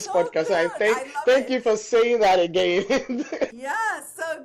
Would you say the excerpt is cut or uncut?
uncut